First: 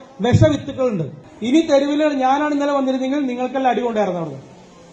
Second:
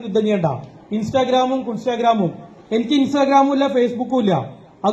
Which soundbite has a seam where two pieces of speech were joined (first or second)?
first